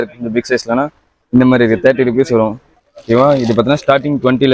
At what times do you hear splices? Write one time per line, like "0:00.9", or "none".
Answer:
0:02.7

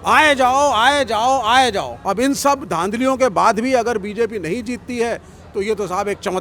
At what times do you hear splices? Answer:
0:01.9

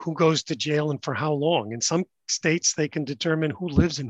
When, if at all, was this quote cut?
none

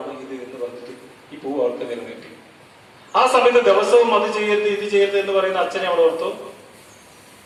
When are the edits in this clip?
none

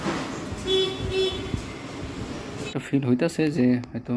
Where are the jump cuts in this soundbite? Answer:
0:02.7

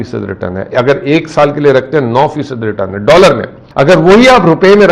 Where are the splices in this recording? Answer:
0:03.6

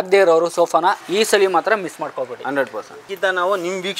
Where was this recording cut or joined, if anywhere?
0:01.0
0:03.0

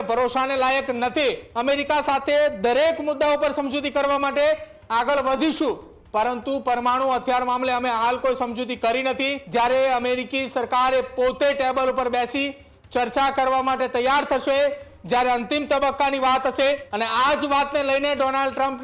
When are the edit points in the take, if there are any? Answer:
0:01.5
0:09.4
0:16.9

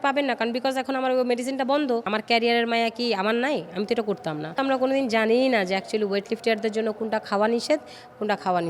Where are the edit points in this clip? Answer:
0:02.1
0:04.6

